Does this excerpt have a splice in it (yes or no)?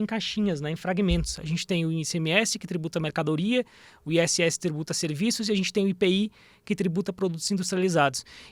no